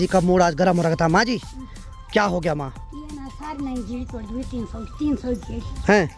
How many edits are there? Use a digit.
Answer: 0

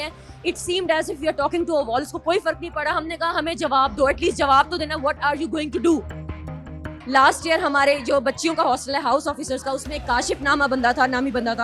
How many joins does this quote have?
0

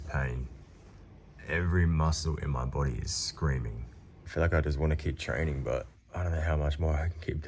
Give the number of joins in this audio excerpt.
1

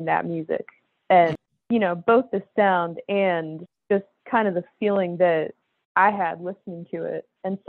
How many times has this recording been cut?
1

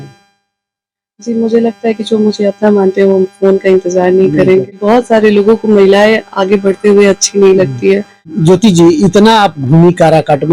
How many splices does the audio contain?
2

